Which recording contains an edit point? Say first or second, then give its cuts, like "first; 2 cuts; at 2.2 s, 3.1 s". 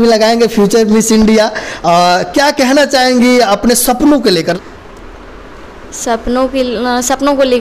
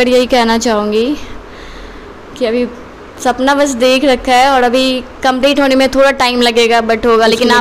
first; 1 cut; at 4.5 s